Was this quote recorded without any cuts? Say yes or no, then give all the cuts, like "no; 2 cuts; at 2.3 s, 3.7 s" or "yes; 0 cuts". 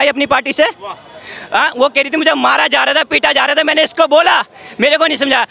yes; 0 cuts